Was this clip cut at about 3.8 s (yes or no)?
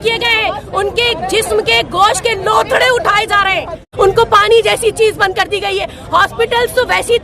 yes